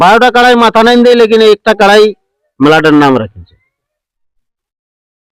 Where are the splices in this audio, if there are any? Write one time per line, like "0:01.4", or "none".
none